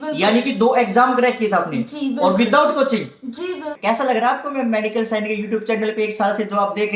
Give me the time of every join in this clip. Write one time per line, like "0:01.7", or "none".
0:03.7